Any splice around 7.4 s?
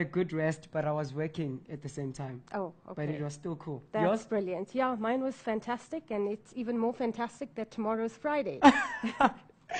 no; 1 cut; at 4.2 s

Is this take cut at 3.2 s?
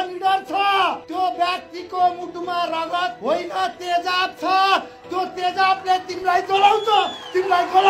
yes; 2 cuts; at 1.0 s, 3.2 s

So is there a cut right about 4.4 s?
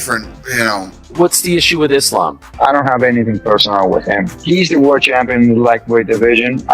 no; 1 cut; at 1.2 s

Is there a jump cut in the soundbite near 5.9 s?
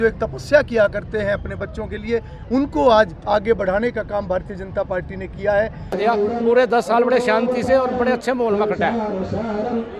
yes; 1 cut; at 5.9 s

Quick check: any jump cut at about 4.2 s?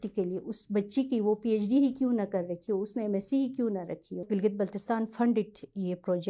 yes; 1 cut; at 4.2 s

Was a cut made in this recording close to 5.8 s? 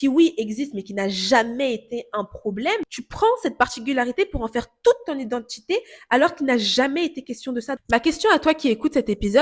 no; 2 cuts; at 3.0 s, 7.8 s

